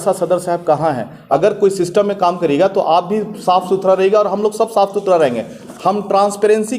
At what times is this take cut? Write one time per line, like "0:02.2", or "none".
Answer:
0:01.1
0:05.6